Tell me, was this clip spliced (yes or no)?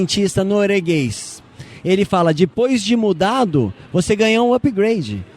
no